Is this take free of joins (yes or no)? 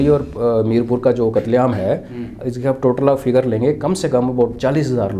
yes